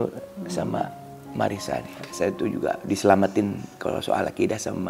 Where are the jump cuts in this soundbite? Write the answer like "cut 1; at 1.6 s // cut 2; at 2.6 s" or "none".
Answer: cut 1; at 2.1 s